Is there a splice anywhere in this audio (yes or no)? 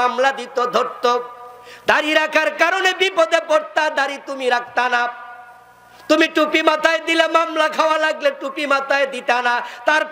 no